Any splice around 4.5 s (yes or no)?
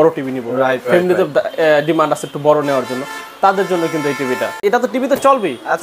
yes